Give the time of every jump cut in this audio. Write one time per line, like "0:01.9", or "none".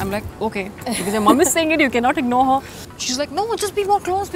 0:02.8